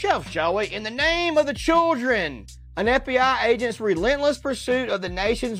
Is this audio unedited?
yes; 0 cuts

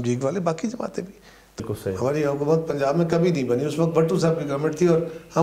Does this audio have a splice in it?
yes; 1 cut; at 1.6 s

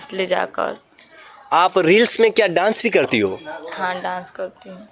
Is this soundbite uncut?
yes; 0 cuts

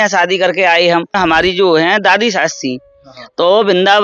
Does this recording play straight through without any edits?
no; 1 cut; at 1.2 s

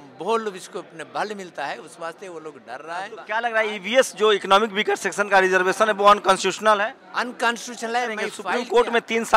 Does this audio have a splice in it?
yes; 2 cuts; at 3.2 s, 8.4 s

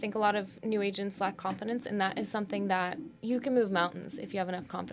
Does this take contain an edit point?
no; 0 cuts

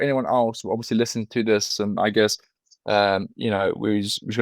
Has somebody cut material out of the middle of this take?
no; 0 cuts

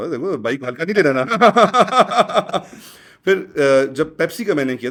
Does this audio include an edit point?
no; 0 cuts

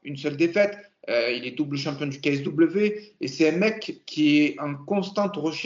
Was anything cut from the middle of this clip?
no; 0 cuts

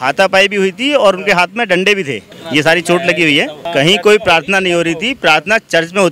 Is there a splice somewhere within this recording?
yes; 2 cuts; at 2.3 s, 3.6 s

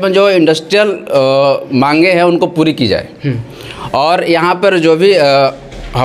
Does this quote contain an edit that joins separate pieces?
no; 0 cuts

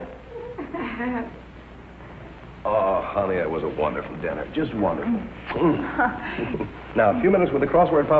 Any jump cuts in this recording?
yes; 1 cut; at 1.0 s

